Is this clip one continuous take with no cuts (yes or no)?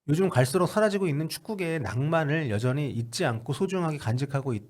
yes